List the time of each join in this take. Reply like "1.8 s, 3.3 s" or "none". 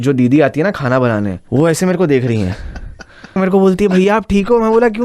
1.4 s, 3.3 s